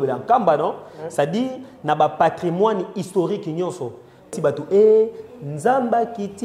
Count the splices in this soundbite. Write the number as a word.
one